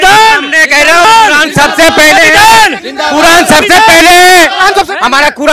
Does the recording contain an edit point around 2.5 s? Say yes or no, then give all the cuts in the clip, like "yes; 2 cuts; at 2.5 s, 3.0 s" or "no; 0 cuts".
no; 1 cut; at 1.0 s